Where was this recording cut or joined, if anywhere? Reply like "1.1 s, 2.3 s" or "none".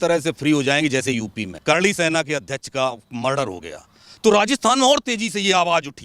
1.5 s